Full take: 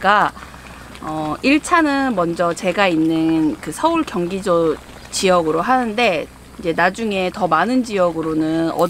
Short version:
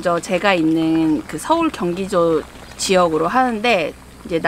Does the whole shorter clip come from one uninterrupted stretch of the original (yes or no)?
yes